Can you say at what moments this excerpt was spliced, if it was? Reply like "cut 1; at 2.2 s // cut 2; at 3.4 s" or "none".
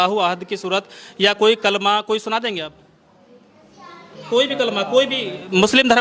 none